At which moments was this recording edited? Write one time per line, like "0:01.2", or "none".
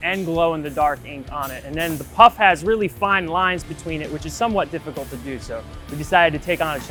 none